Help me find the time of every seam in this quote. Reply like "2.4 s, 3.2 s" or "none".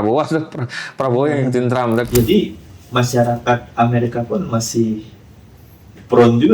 2.1 s